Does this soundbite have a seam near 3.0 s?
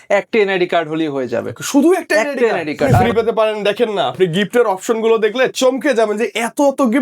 yes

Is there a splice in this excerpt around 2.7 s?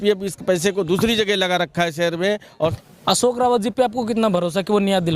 yes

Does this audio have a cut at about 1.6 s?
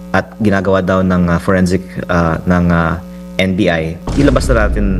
no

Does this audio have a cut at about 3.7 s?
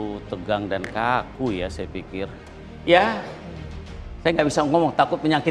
no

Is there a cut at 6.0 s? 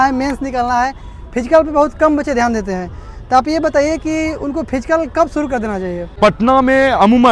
yes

